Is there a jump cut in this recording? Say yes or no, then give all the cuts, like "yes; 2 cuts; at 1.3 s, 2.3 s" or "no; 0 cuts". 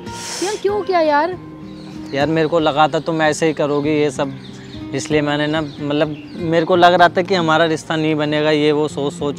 no; 0 cuts